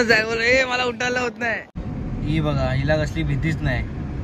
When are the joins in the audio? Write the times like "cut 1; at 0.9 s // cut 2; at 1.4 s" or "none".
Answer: cut 1; at 1.7 s